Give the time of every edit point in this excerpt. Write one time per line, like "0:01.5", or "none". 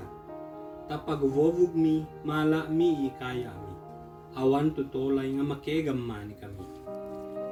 none